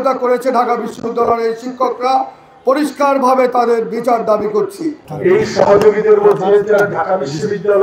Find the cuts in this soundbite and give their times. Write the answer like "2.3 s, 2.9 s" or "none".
5.1 s